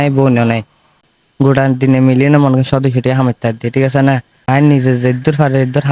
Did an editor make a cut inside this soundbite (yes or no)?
yes